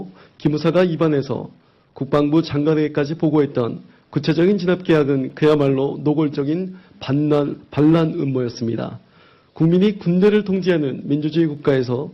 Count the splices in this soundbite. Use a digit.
0